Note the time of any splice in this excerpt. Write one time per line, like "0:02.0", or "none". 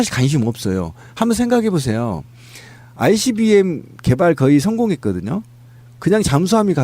0:03.7